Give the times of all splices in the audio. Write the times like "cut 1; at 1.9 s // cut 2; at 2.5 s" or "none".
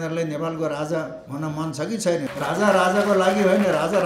cut 1; at 2.3 s